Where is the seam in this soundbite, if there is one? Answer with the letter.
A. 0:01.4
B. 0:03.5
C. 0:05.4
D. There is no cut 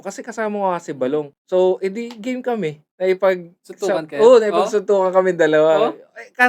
A